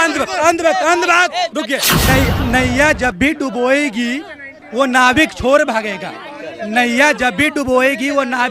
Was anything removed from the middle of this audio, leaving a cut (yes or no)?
yes